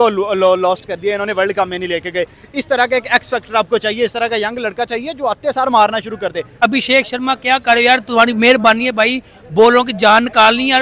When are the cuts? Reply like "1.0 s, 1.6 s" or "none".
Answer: 6.5 s